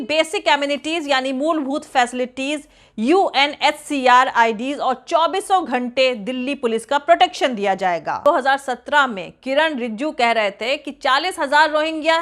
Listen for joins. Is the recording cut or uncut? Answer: cut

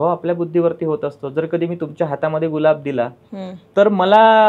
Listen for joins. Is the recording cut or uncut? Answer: uncut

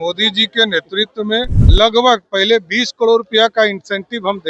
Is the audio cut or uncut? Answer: cut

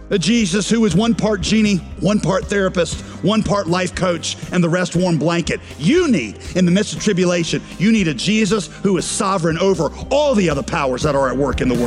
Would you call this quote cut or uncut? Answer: cut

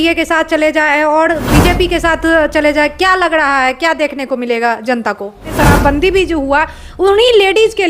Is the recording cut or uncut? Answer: cut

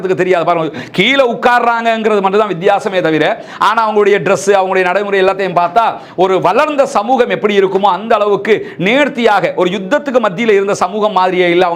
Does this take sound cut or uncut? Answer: uncut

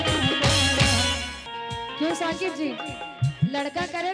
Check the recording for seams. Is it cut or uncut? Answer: cut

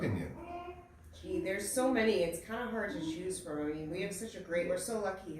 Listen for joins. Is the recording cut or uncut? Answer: uncut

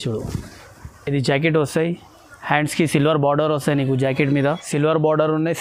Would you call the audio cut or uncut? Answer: cut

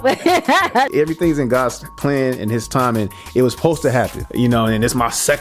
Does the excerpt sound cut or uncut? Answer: cut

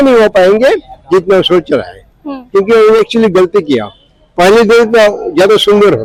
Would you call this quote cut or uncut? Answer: uncut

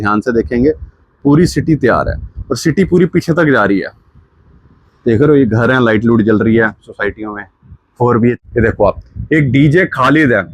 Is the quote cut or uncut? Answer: cut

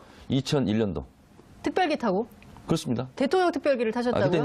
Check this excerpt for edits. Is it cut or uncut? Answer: uncut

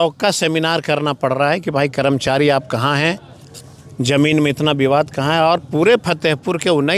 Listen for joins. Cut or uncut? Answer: uncut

